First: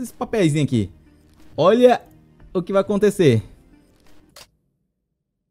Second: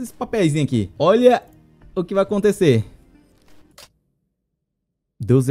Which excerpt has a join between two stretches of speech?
second; 1 cut; at 0.9 s

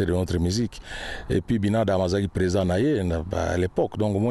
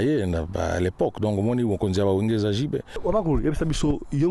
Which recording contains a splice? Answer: second; 1 cut; at 2.9 s

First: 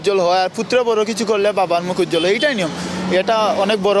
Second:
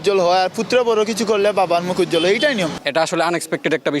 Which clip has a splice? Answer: second; 1 cut; at 2.8 s

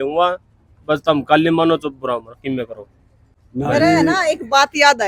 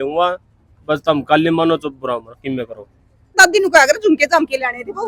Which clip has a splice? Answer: second; 1 cut; at 3.4 s

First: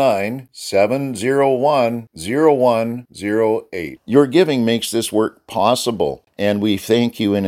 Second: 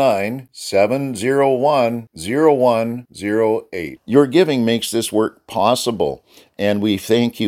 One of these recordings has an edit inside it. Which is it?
first; 1 cut; at 6.2 s

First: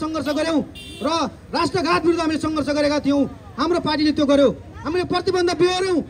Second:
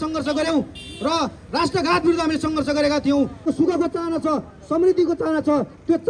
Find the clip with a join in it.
second; 1 cut; at 3.4 s

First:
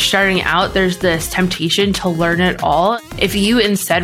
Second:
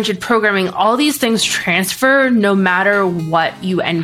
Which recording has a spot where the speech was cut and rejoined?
first; 1 cut; at 3.0 s

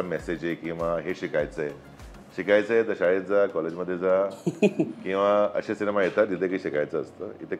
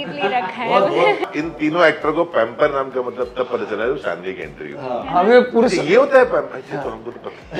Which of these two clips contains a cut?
second; 1 cut; at 1.3 s

